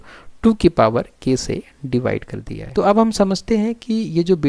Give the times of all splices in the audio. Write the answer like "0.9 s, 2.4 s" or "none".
2.6 s